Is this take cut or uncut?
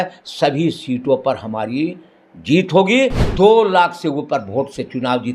cut